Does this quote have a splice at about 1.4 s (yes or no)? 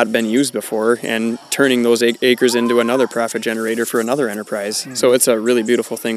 no